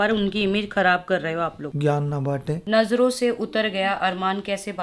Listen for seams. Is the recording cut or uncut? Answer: cut